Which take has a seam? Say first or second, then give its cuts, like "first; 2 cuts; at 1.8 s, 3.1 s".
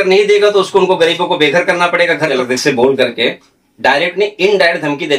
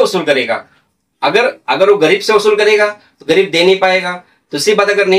first; 1 cut; at 2.4 s